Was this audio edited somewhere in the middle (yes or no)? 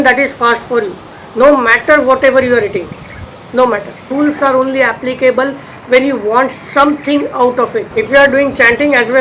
yes